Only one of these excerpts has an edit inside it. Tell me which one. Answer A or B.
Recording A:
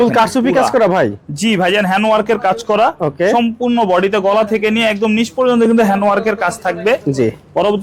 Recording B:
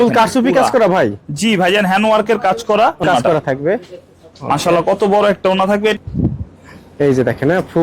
B